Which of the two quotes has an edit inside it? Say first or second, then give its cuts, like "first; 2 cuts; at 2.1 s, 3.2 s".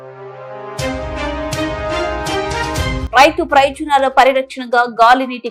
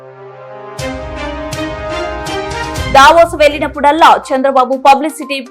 second; 1 cut; at 2.9 s